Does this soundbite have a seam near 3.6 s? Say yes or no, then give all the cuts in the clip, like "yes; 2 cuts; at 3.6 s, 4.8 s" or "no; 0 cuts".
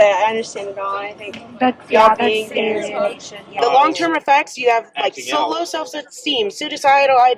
yes; 1 cut; at 3.6 s